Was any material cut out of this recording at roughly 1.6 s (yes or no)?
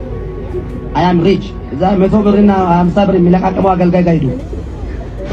yes